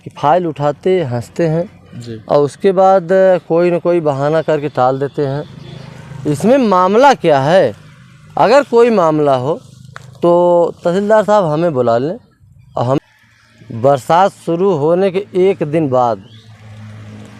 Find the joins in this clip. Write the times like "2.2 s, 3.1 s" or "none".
13.0 s